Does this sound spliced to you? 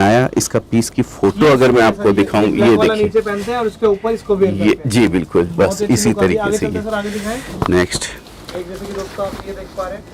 no; 0 cuts

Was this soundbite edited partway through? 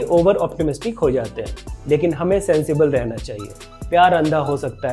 no; 0 cuts

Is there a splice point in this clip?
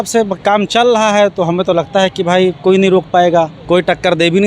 yes; 1 cut; at 3.6 s

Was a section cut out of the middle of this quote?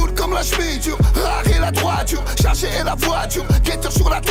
no; 0 cuts

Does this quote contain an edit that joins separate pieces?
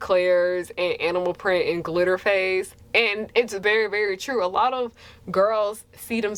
no; 0 cuts

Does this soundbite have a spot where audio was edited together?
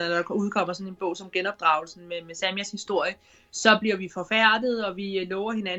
no; 0 cuts

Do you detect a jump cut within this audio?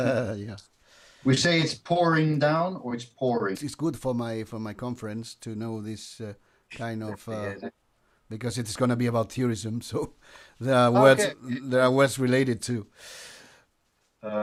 no; 0 cuts

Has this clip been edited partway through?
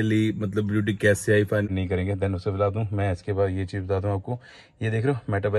yes; 1 cut; at 1.7 s

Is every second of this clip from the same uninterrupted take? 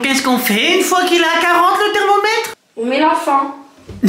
no; 1 cut; at 2.6 s

